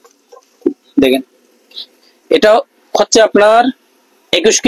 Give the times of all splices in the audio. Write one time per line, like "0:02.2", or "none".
none